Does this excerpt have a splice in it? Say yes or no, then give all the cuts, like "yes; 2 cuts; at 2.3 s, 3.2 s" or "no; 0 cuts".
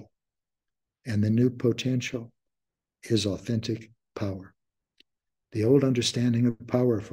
no; 0 cuts